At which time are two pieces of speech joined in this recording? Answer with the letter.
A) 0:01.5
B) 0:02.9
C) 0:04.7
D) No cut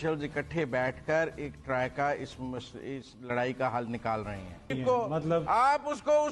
C